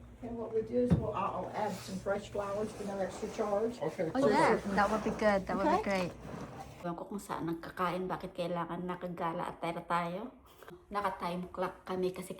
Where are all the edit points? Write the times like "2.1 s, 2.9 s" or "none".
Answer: 6.7 s, 10.7 s